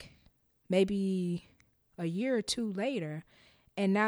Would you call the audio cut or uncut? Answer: uncut